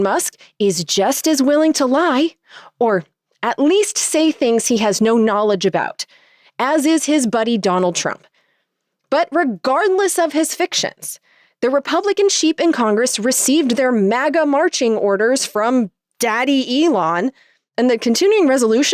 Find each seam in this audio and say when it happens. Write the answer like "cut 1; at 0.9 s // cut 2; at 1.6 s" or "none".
none

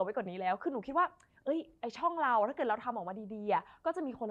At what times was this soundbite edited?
none

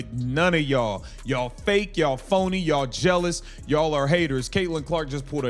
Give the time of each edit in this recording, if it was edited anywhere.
cut 1; at 3.0 s

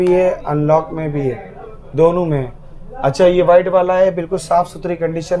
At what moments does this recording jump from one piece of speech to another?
none

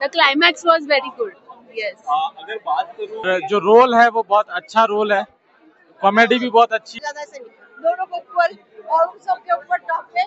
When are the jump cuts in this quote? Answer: cut 1; at 3.2 s // cut 2; at 6.9 s

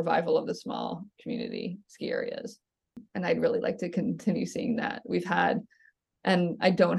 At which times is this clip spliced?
none

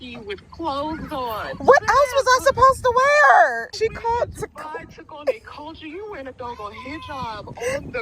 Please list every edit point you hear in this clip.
cut 1; at 3.7 s

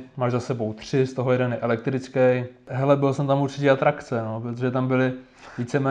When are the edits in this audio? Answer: cut 1; at 2.7 s

